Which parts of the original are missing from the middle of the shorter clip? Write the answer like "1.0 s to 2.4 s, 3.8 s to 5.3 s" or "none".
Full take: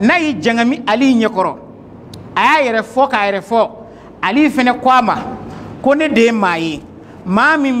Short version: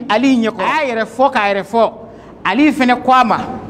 1.9 s to 2.9 s